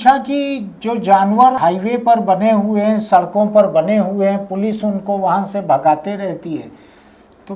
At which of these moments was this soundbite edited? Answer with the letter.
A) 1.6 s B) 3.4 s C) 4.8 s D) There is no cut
A